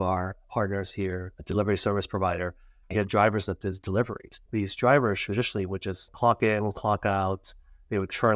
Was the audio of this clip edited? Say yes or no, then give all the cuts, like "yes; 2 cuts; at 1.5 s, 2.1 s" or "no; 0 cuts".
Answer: yes; 2 cuts; at 2.8 s, 4.4 s